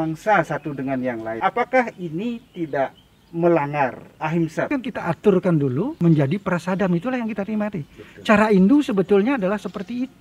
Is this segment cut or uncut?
cut